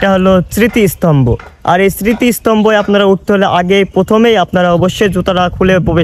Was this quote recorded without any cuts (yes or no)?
yes